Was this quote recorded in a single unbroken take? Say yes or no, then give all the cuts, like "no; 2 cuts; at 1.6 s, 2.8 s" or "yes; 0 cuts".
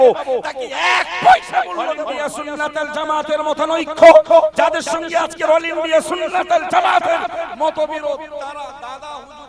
no; 1 cut; at 1.9 s